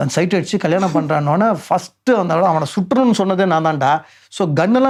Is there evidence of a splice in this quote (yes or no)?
no